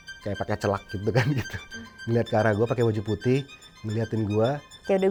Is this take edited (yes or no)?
no